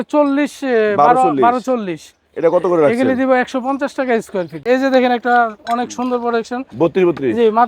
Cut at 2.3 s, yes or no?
no